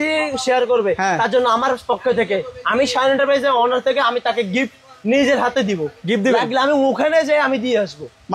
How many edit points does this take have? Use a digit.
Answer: 0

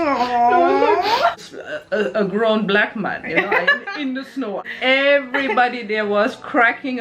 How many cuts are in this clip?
2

